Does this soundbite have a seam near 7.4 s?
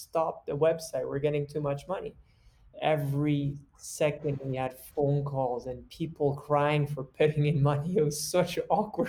no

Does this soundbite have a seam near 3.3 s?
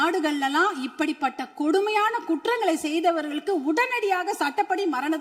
no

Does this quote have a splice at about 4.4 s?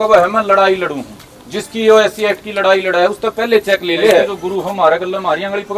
yes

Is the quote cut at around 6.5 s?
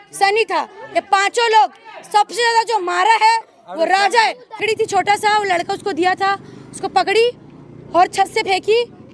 no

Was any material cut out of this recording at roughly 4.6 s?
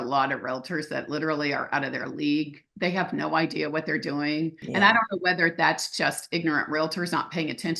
yes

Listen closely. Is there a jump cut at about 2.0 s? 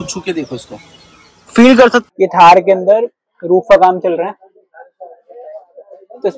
yes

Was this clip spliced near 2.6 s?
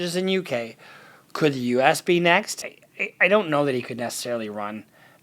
yes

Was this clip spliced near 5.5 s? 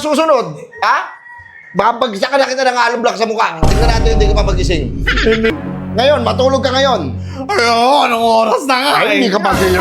yes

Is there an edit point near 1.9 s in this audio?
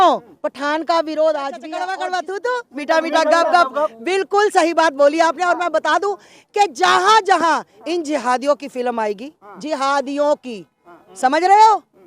yes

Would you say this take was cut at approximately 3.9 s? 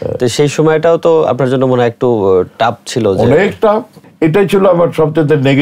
yes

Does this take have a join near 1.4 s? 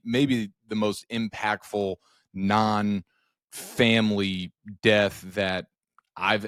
no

